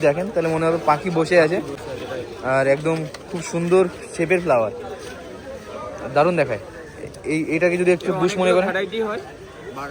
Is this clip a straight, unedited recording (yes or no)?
yes